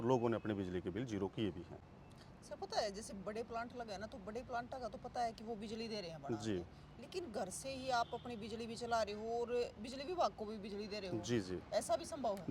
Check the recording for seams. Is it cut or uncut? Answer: uncut